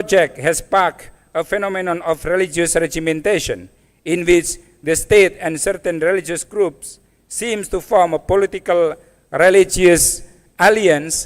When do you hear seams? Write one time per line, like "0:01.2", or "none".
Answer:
none